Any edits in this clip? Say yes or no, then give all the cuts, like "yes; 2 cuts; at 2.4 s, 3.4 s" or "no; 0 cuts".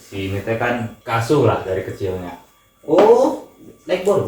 yes; 1 cut; at 1.0 s